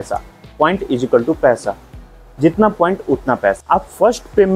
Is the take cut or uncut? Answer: cut